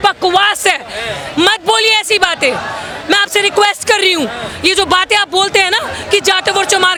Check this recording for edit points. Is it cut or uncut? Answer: uncut